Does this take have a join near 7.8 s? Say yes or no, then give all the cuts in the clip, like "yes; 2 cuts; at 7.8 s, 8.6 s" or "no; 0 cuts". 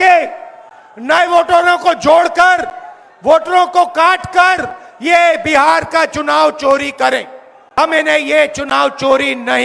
yes; 1 cut; at 7.8 s